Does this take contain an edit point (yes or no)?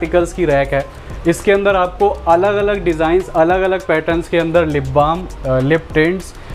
no